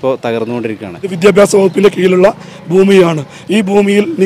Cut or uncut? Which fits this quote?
cut